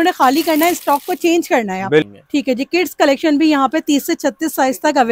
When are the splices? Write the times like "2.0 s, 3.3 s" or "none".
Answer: 2.2 s